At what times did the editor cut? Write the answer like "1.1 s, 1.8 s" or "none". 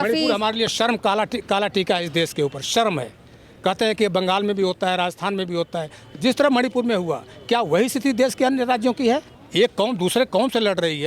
9.4 s